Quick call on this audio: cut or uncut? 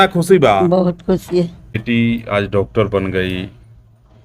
cut